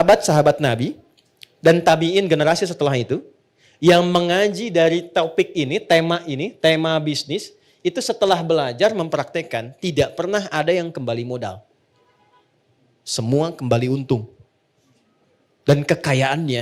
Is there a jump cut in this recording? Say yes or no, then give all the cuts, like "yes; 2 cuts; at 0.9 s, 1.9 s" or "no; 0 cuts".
no; 0 cuts